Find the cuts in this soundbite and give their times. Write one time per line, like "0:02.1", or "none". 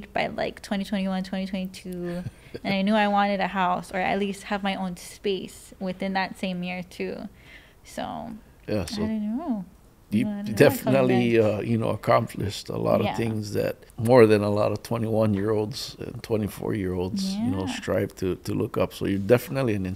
0:13.9